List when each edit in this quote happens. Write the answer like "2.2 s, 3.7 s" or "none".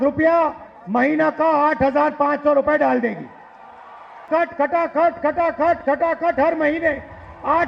4.3 s